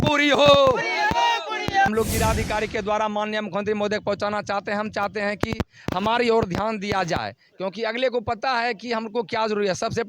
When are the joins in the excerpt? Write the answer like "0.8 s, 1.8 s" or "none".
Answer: 1.9 s

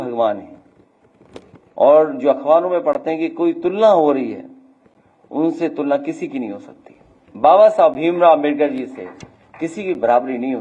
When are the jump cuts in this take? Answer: 7.2 s

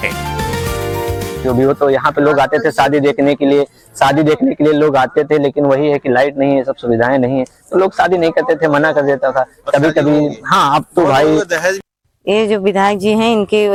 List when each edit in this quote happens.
none

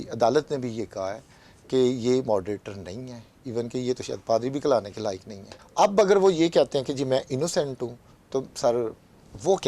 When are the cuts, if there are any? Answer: 5.5 s

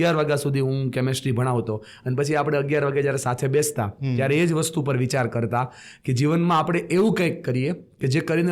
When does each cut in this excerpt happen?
none

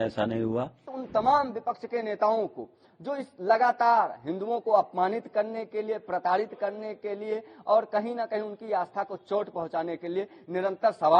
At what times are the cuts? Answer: 1.0 s

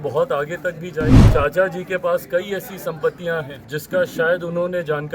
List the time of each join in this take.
1.2 s, 3.6 s

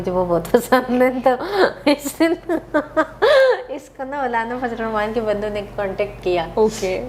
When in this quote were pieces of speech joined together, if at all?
none

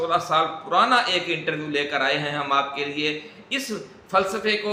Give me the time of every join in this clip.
none

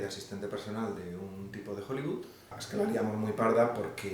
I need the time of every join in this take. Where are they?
2.6 s

